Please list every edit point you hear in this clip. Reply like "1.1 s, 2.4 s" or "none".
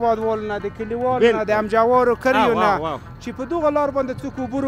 none